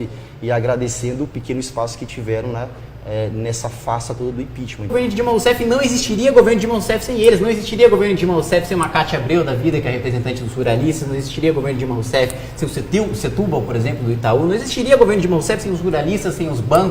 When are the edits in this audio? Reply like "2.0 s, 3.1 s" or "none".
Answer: none